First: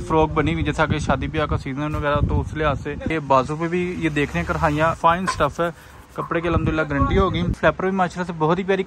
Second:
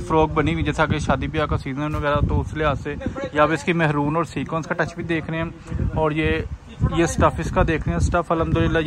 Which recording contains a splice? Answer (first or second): first